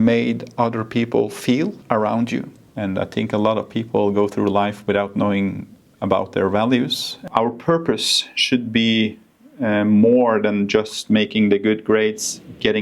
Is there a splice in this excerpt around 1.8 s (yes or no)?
yes